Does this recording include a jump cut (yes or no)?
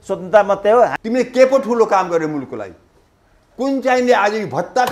yes